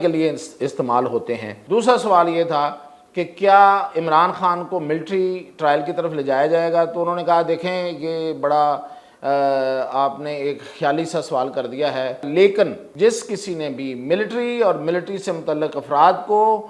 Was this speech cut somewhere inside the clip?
yes; 3 cuts; at 1.5 s, 12.3 s, 12.8 s

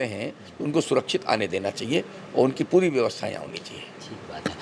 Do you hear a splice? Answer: no; 0 cuts

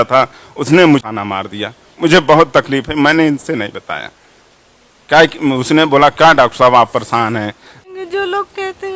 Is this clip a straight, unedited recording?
no; 2 cuts; at 1.1 s, 7.9 s

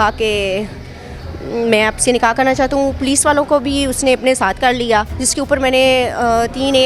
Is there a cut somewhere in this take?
yes; 1 cut; at 5.2 s

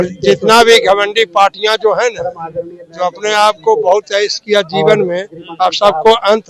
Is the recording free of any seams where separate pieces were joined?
yes; 0 cuts

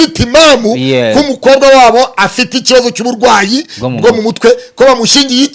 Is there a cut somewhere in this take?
no; 0 cuts

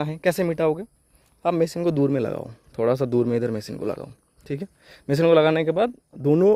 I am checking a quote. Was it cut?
no; 0 cuts

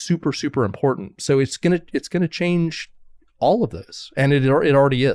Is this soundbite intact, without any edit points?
yes; 0 cuts

